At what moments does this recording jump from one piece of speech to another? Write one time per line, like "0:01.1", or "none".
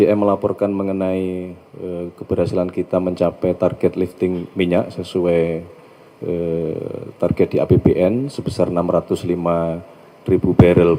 none